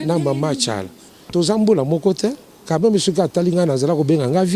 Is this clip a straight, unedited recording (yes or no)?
no